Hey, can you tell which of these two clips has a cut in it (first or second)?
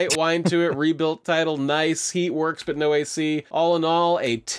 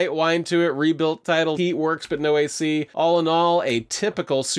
second